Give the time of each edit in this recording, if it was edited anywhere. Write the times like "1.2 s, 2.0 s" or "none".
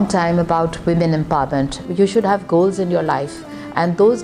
1.9 s